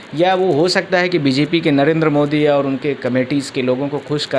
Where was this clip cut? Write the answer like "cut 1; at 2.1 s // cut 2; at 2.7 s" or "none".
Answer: none